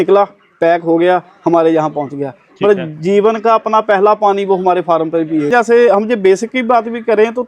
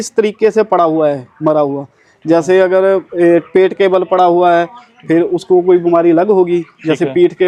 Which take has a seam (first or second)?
first